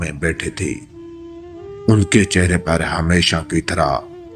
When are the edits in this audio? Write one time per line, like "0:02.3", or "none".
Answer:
none